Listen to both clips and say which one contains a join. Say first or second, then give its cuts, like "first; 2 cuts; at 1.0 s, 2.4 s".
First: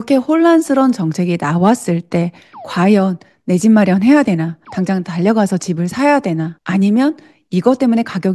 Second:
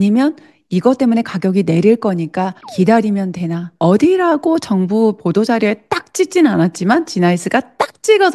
second; 2 cuts; at 2.6 s, 3.6 s